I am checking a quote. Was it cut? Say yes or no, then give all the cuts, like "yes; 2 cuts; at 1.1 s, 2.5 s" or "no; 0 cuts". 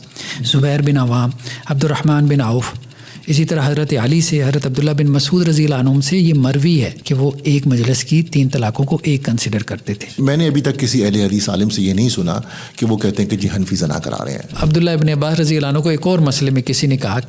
yes; 3 cuts; at 7.0 s, 10.2 s, 14.5 s